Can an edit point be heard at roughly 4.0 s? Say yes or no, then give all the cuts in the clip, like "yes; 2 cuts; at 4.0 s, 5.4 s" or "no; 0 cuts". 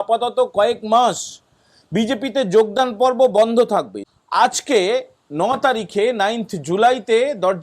yes; 1 cut; at 4.0 s